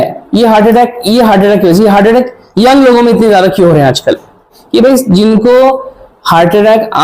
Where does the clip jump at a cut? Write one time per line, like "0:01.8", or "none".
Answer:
0:04.6